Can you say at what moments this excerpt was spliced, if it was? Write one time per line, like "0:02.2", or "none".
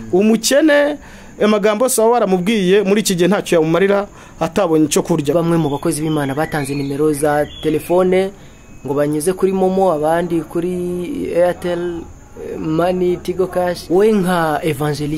0:05.3
0:13.8